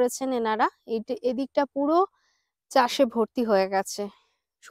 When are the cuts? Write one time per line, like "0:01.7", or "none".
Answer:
none